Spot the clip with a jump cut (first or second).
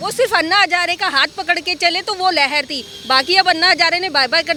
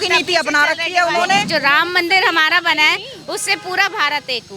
second